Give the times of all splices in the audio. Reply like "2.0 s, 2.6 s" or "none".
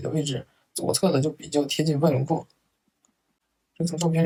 none